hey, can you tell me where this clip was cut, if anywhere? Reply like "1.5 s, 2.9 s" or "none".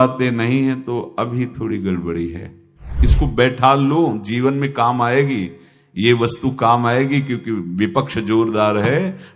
3.0 s